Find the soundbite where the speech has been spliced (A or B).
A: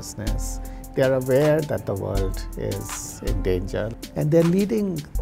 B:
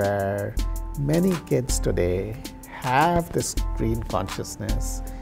A